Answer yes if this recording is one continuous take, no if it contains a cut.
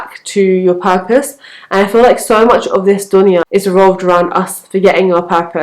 no